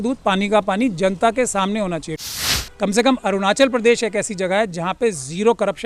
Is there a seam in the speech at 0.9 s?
no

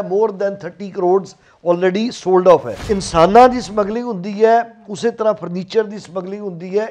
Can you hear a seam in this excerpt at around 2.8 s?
yes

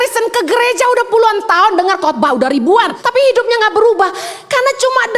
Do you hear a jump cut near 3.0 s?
yes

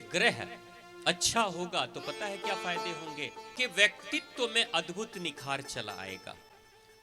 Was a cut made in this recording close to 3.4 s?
yes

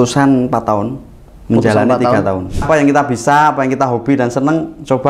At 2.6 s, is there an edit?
yes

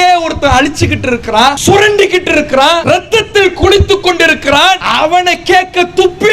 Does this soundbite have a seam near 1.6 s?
yes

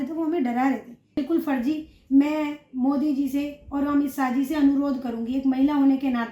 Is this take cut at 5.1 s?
no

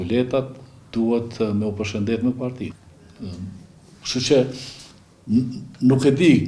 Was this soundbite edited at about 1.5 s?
no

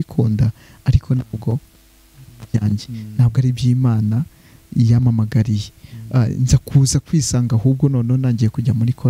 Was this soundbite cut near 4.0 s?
no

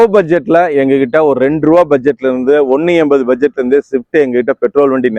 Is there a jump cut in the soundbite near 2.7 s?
no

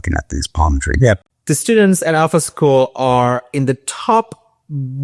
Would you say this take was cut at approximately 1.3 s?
yes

